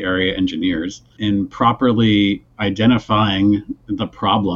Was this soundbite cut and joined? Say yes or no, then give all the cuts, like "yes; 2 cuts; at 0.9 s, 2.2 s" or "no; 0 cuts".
yes; 1 cut; at 1.2 s